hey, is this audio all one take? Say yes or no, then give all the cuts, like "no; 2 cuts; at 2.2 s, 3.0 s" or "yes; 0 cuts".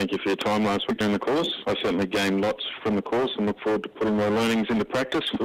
no; 2 cuts; at 1.6 s, 2.7 s